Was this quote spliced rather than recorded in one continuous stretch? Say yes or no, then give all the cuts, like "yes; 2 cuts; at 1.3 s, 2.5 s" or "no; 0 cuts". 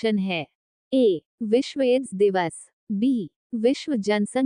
yes; 2 cuts; at 0.9 s, 2.7 s